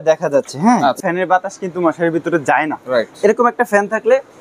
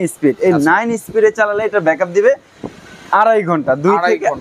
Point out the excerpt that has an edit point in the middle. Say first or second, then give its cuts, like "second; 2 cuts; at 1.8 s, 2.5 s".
first; 1 cut; at 1.0 s